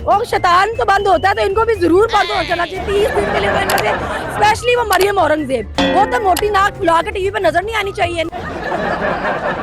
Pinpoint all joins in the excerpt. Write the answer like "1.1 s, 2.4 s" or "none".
8.3 s